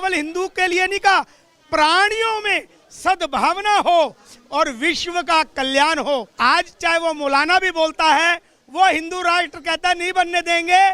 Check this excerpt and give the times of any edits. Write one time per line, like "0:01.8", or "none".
0:06.3